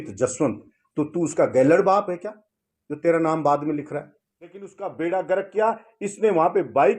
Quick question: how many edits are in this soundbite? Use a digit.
1